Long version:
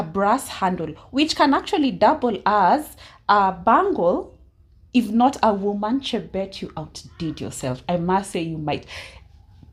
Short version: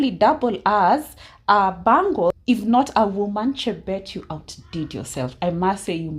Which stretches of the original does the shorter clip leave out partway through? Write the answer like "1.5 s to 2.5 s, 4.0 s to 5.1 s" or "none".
4.2 s to 4.9 s